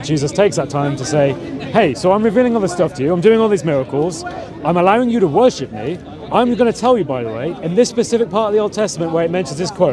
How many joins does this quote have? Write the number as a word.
zero